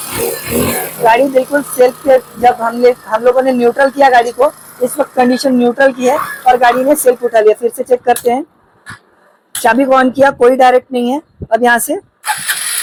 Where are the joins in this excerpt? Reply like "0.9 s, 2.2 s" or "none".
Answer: none